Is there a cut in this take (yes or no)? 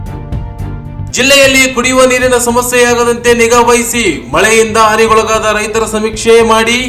yes